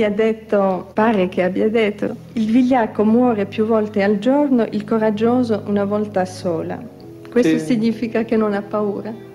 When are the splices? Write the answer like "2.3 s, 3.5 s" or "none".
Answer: 0.8 s, 2.2 s